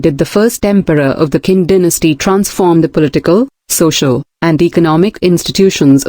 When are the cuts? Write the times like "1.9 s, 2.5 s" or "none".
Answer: none